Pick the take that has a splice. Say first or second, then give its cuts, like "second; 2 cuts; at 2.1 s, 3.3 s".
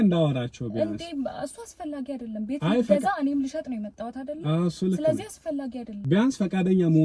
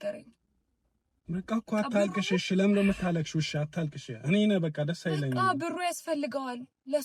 first; 1 cut; at 5.9 s